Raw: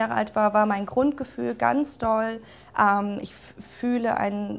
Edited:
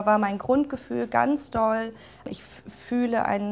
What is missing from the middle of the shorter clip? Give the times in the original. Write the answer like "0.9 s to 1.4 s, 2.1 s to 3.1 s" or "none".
2.7 s to 3.1 s